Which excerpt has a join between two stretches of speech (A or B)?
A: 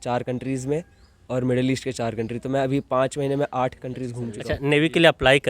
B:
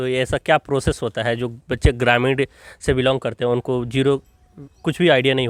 A